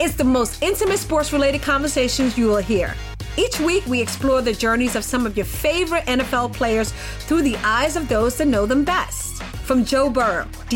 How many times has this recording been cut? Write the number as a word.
zero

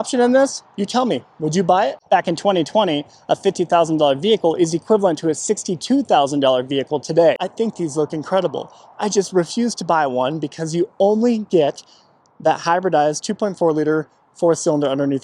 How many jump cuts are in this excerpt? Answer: two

